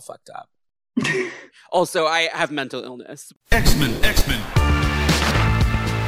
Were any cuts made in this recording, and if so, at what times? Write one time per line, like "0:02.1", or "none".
0:03.2